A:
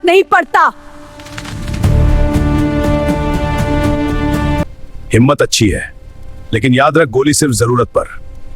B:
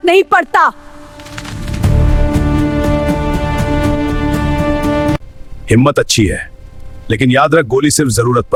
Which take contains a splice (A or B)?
A